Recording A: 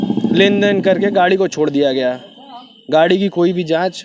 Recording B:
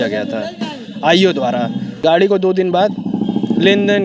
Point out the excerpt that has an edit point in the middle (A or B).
B